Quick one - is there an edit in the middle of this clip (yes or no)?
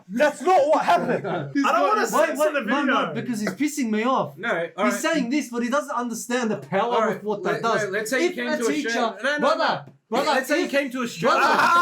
yes